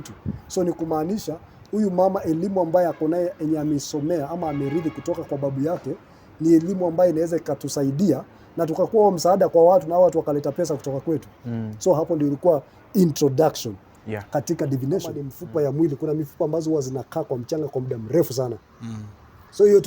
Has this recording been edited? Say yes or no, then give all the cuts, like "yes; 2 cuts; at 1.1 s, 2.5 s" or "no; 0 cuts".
yes; 1 cut; at 15.3 s